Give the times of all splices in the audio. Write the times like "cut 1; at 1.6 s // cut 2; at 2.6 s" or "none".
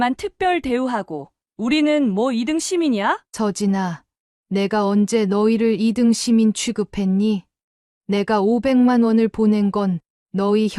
cut 1; at 3.3 s

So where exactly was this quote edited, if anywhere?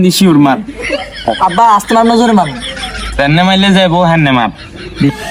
none

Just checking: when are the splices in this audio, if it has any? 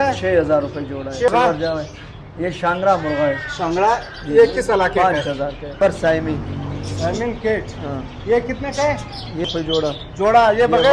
cut 1; at 1.3 s // cut 2; at 5.8 s // cut 3; at 9.5 s

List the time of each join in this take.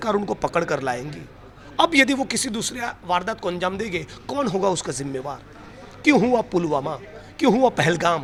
none

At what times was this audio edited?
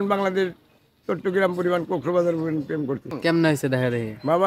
cut 1; at 3.1 s

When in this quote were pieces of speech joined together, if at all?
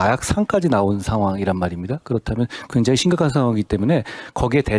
none

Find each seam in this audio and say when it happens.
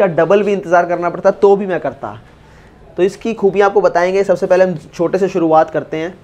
none

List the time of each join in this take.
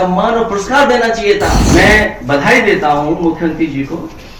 cut 1; at 1.6 s

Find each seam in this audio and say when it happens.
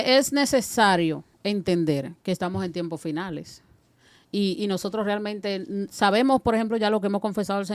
none

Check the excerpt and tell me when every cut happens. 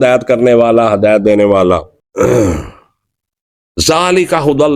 cut 1; at 2.0 s

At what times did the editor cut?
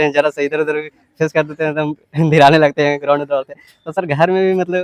none

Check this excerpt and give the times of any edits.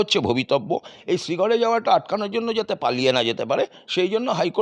none

